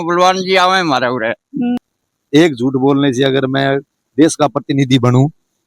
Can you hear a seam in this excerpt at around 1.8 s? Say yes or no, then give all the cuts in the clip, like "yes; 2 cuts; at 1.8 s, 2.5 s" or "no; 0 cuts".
yes; 1 cut; at 1.8 s